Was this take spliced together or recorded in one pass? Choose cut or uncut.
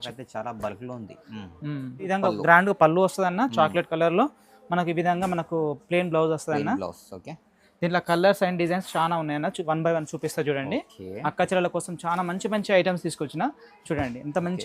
cut